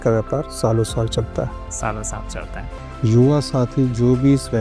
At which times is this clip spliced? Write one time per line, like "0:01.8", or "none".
0:02.8